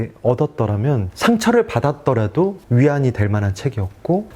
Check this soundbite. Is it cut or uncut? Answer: cut